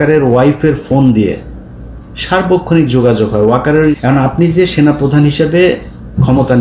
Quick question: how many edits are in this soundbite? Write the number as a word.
one